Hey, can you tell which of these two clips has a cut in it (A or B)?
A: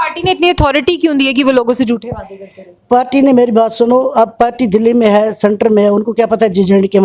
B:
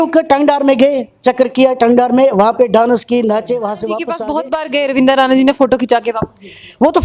B